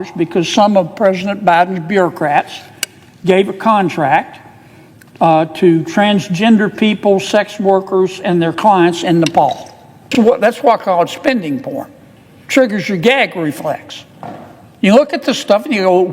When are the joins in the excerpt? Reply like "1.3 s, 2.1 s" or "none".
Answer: 10.1 s